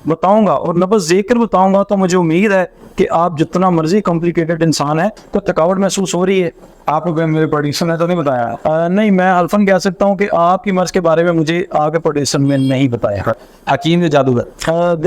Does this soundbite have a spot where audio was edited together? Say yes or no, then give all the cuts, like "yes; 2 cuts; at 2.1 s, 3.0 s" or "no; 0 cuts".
yes; 2 cuts; at 5.1 s, 13.4 s